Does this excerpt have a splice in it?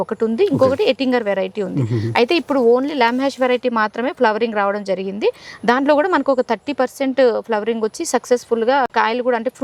no; 0 cuts

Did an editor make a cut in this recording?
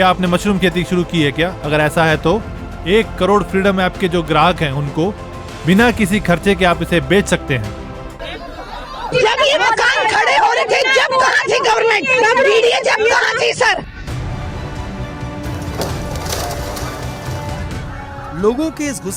yes; 1 cut; at 8.1 s

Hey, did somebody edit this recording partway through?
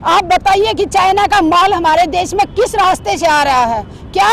no; 0 cuts

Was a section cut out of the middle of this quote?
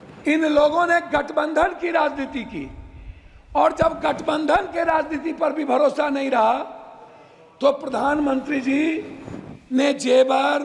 no; 0 cuts

